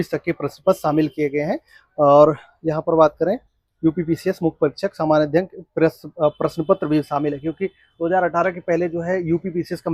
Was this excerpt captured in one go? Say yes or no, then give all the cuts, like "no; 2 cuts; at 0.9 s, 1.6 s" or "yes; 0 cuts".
yes; 0 cuts